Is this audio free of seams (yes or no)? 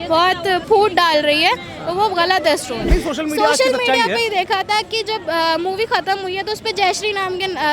no